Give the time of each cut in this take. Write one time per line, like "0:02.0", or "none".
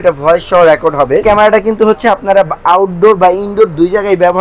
0:01.2